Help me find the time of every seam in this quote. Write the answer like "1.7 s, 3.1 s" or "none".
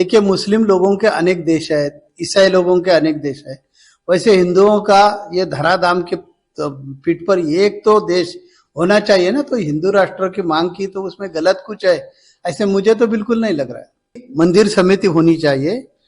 14.2 s